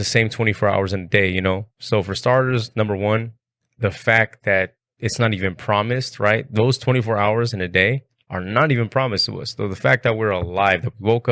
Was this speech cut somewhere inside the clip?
no; 0 cuts

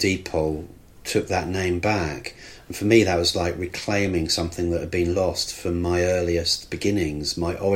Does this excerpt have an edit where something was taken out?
no; 0 cuts

